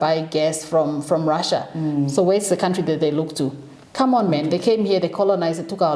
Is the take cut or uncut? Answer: uncut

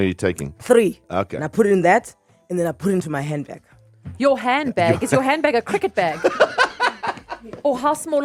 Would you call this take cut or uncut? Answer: uncut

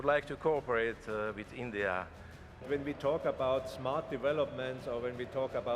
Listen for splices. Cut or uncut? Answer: cut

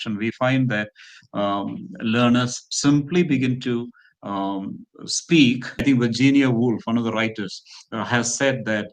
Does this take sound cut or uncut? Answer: cut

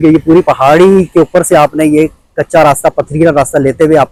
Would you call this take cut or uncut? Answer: uncut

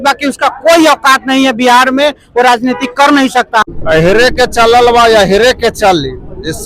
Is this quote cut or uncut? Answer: cut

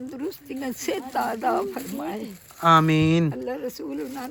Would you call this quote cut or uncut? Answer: uncut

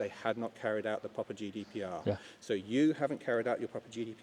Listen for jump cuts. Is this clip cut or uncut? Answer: uncut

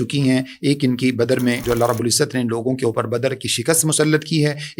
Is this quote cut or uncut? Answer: cut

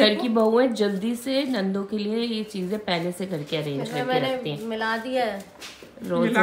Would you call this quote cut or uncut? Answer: uncut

